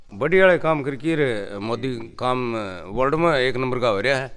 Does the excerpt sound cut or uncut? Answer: uncut